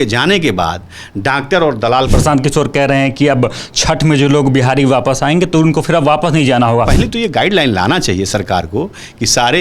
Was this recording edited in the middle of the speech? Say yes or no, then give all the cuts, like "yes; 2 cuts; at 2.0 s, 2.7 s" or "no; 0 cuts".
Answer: yes; 2 cuts; at 2.1 s, 6.9 s